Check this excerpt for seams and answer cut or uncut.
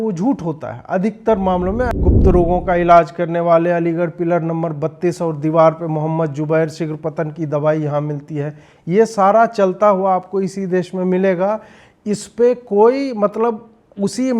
cut